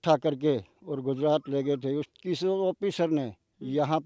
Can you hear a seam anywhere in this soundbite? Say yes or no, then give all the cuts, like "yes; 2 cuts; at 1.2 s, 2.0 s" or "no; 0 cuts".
yes; 1 cut; at 2.1 s